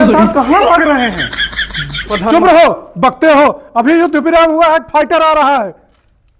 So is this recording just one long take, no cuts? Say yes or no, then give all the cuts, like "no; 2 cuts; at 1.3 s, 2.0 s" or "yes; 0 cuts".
yes; 0 cuts